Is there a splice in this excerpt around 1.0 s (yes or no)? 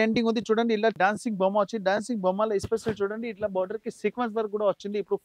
yes